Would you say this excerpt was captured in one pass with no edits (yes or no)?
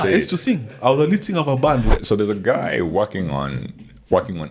no